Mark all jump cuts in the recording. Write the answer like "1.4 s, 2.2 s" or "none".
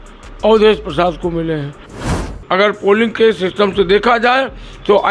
2.3 s